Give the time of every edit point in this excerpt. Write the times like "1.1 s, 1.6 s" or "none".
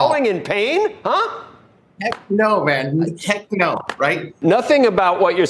4.3 s